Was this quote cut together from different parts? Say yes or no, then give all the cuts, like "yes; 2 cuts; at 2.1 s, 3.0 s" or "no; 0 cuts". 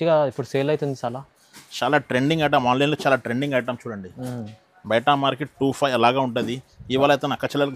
no; 0 cuts